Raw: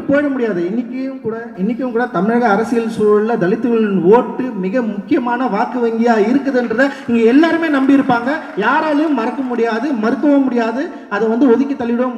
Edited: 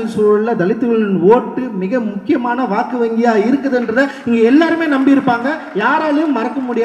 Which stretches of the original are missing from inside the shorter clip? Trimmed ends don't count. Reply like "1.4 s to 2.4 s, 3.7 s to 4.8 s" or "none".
none